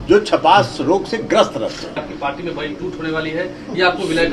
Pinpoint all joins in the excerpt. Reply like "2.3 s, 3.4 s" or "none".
2.0 s